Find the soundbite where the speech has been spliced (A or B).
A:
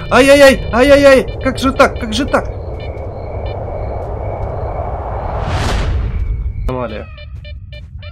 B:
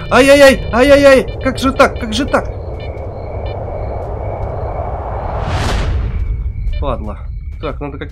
A